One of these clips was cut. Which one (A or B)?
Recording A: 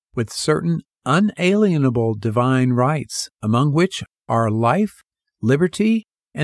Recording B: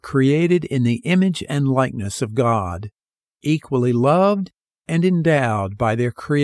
A